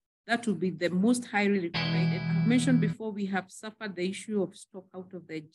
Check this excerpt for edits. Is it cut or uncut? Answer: cut